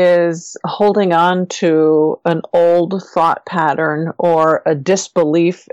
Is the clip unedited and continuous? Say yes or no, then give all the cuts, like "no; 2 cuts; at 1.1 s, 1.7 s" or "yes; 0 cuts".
yes; 0 cuts